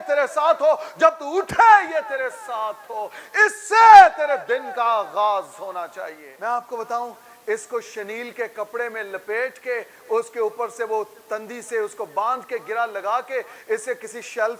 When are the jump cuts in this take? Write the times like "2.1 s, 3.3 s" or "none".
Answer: 6.2 s